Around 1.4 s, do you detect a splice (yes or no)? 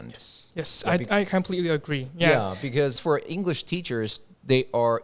no